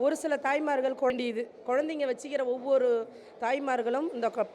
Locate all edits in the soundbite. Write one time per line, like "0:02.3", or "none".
0:01.1